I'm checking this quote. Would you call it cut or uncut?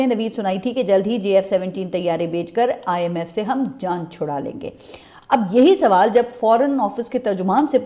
uncut